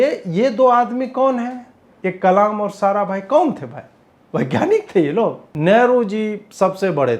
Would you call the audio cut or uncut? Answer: cut